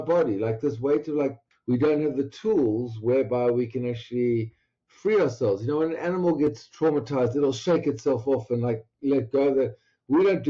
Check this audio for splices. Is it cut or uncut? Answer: cut